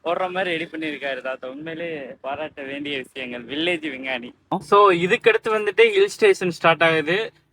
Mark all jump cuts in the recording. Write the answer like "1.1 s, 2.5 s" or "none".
4.6 s

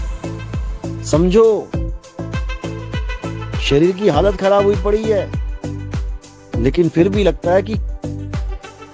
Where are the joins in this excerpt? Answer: 1.7 s, 3.6 s, 5.3 s, 6.6 s

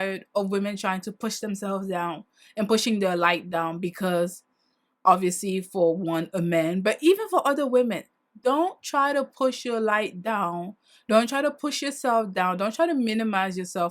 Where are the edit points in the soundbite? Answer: none

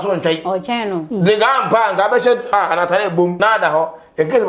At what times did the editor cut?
1.1 s, 2.5 s, 3.3 s

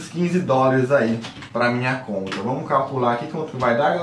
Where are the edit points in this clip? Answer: none

